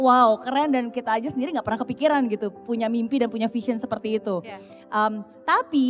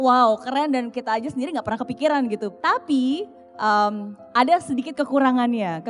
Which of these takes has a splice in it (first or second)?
second